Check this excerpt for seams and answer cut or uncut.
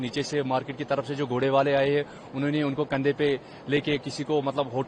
uncut